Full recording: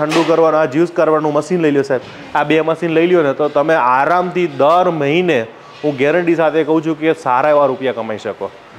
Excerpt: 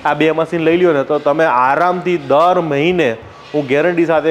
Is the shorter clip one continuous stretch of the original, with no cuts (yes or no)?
yes